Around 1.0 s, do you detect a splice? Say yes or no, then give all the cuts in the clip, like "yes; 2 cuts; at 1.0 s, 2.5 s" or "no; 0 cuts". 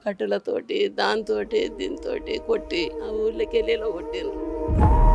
no; 1 cut; at 3.0 s